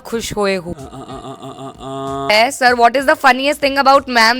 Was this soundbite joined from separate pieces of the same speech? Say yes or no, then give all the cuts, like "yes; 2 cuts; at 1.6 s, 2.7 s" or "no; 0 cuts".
yes; 1 cut; at 2.3 s